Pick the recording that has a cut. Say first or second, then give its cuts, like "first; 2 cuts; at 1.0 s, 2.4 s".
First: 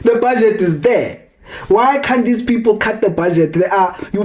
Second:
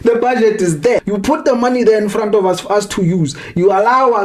second; 1 cut; at 1.0 s